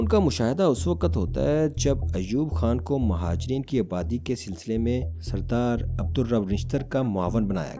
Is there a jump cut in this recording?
no; 0 cuts

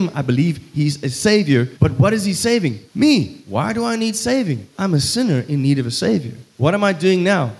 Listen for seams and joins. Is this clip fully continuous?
no; 5 cuts; at 1.7 s, 2.8 s, 3.4 s, 4.7 s, 6.4 s

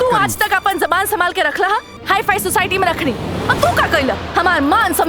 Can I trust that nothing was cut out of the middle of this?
no; 1 cut; at 1.9 s

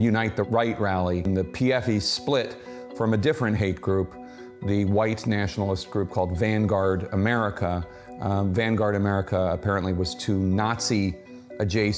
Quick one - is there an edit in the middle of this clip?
yes; 1 cut; at 1.2 s

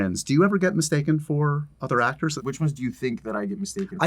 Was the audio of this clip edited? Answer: yes; 1 cut; at 2.4 s

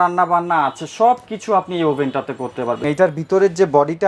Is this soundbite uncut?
no; 1 cut; at 2.8 s

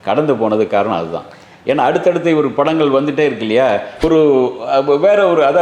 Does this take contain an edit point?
yes; 1 cut; at 3.9 s

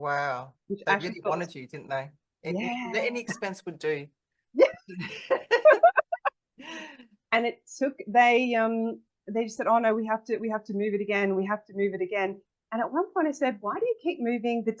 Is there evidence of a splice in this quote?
no; 0 cuts

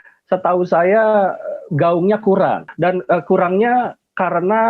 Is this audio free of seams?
no; 1 cut; at 2.7 s

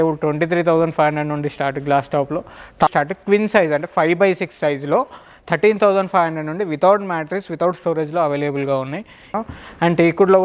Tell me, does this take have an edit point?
yes; 2 cuts; at 2.9 s, 9.3 s

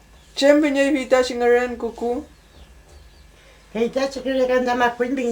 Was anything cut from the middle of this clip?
yes; 1 cut; at 3.3 s

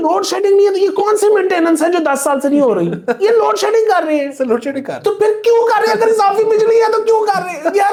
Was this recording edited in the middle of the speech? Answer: no; 0 cuts

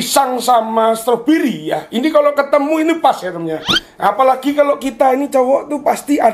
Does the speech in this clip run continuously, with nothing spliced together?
yes; 0 cuts

